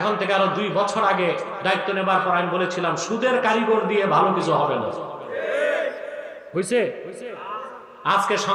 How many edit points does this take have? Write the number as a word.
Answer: zero